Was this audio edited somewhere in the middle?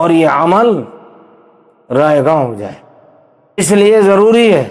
yes; 1 cut; at 3.6 s

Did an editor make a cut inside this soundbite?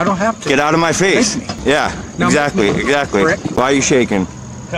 yes; 2 cuts; at 1.5 s, 3.6 s

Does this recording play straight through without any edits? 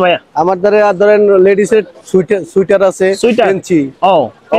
yes; 0 cuts

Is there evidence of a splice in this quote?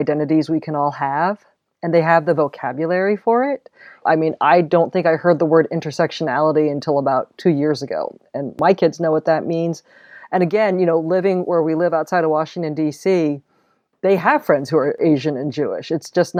no; 0 cuts

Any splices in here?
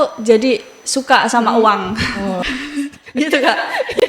yes; 1 cut; at 2.4 s

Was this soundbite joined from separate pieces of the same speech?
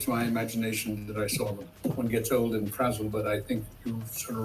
yes; 1 cut; at 1.7 s

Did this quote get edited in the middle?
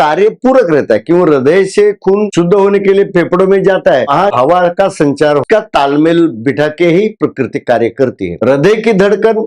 yes; 3 cuts; at 4.1 s, 5.4 s, 8.4 s

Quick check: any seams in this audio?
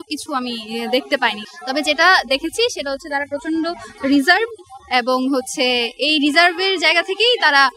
yes; 1 cut; at 1.4 s

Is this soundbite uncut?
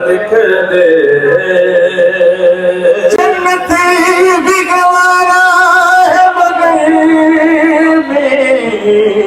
yes; 0 cuts

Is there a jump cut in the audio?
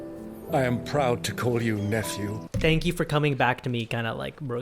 yes; 1 cut; at 2.4 s

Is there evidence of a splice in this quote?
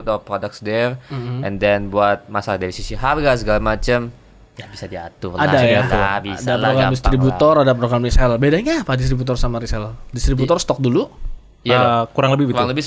no; 0 cuts

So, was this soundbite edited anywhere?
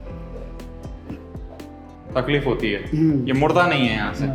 yes; 1 cut; at 2.1 s

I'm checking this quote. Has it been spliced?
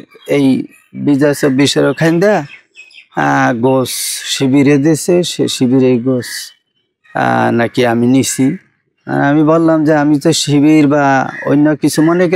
no; 0 cuts

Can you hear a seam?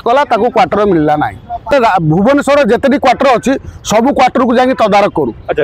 yes; 1 cut; at 1.7 s

